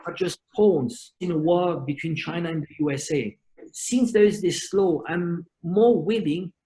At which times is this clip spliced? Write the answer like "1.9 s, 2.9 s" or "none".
3.6 s